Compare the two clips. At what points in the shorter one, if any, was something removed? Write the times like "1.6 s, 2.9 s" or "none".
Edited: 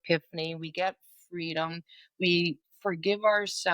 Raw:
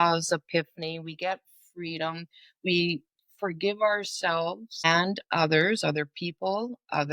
2.7 s